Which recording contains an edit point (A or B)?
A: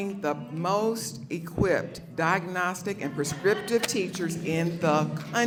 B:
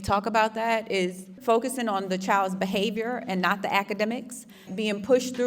B